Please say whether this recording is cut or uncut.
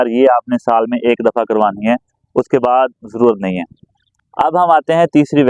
uncut